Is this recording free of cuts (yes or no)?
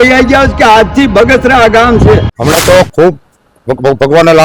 no